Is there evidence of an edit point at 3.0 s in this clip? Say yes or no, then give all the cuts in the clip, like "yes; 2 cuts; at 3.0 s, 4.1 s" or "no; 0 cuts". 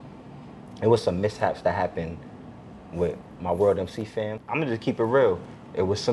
no; 1 cut; at 4.4 s